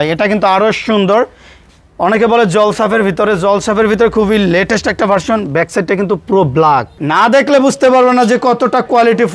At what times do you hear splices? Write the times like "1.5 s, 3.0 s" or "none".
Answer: 7.0 s

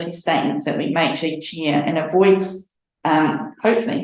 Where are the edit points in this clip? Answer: none

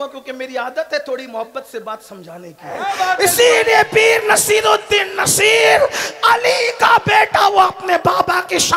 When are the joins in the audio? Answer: 2.8 s

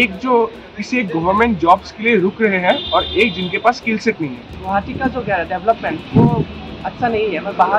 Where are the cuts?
4.5 s

